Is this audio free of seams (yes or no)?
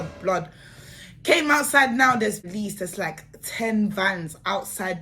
no